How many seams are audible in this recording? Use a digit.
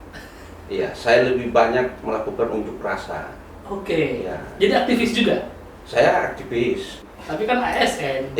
1